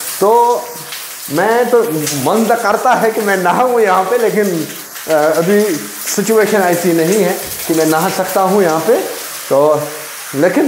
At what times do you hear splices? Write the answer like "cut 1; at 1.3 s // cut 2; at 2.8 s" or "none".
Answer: none